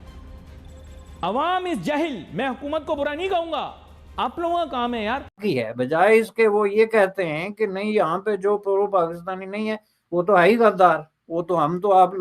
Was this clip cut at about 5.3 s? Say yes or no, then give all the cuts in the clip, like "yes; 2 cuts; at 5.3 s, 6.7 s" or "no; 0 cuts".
yes; 1 cut; at 5.3 s